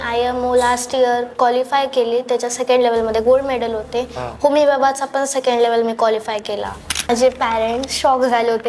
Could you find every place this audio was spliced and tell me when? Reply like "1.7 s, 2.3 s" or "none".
7.1 s